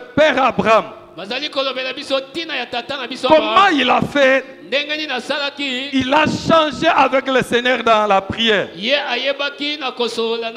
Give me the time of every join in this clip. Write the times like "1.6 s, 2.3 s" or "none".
none